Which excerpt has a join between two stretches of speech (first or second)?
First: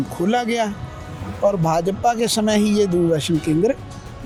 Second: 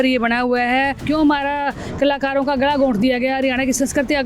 second